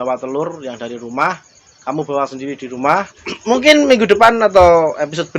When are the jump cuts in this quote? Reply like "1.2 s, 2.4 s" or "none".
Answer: 3.3 s